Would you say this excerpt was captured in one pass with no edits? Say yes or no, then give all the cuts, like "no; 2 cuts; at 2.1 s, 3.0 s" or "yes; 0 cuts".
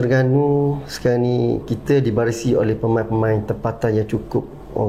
yes; 0 cuts